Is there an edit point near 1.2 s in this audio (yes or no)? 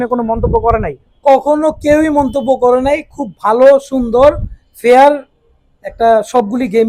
no